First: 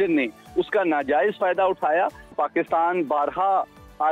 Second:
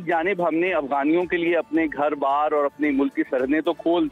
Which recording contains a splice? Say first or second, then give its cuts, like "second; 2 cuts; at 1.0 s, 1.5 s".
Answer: first; 1 cut; at 2.3 s